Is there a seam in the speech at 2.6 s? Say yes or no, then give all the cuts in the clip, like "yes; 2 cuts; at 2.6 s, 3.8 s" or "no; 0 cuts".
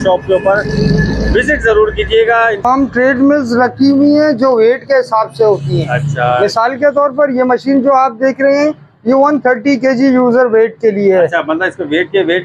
yes; 1 cut; at 2.6 s